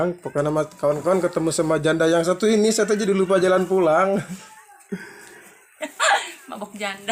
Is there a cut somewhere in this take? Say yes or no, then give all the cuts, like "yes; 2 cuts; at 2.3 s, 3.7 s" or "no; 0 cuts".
no; 0 cuts